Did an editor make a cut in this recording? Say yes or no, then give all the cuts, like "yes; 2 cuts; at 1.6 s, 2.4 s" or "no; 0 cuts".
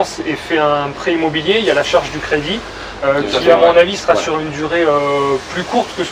no; 0 cuts